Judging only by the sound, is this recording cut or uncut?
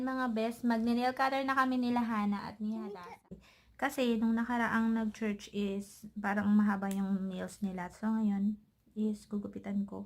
cut